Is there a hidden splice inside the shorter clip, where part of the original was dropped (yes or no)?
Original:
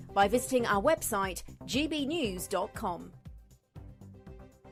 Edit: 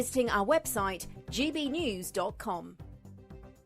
yes